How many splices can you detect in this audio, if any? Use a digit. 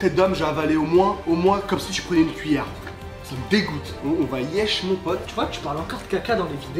2